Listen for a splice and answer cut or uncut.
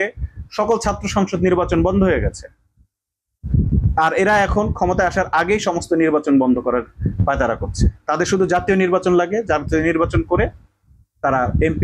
uncut